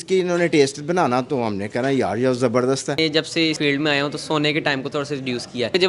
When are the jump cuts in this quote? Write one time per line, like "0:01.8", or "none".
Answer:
0:03.1

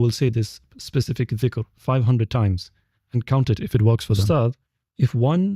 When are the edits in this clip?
0:04.2

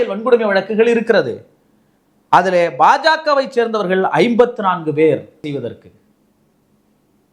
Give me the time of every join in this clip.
0:05.4

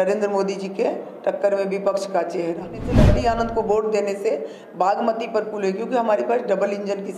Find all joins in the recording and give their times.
0:02.9

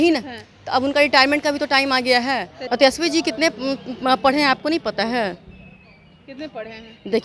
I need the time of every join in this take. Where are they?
0:02.6

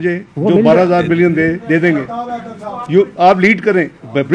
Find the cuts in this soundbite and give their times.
none

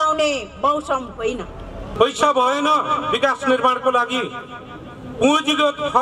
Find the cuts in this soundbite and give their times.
0:01.9

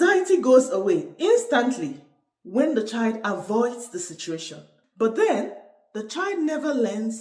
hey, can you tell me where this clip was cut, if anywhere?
none

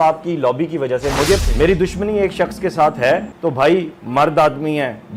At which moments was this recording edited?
0:01.4
0:03.3

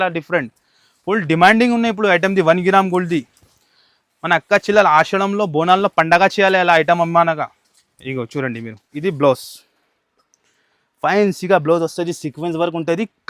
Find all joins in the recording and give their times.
0:08.9

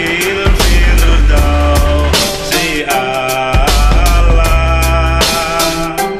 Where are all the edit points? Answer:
none

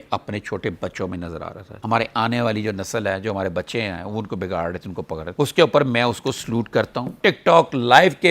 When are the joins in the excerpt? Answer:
0:01.8
0:07.2

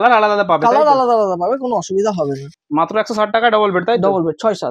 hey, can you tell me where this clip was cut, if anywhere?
0:02.5

